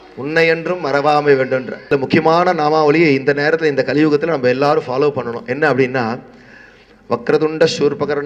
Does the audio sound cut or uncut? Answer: cut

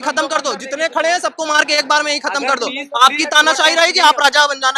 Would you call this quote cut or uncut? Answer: uncut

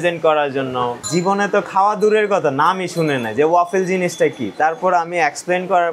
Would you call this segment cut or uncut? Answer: cut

